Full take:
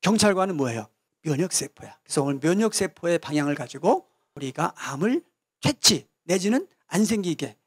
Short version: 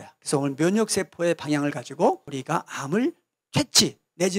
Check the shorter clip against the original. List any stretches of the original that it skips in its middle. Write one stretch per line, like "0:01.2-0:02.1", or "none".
0:04.2-0:04.4